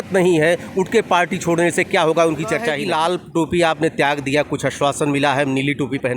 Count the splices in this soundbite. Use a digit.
1